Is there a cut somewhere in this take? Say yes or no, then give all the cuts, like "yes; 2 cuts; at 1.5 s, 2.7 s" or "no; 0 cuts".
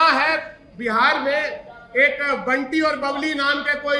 no; 0 cuts